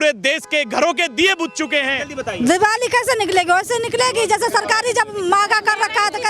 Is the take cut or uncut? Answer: cut